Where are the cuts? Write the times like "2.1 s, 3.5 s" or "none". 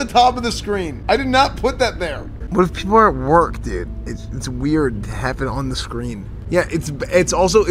0.9 s, 2.4 s, 6.3 s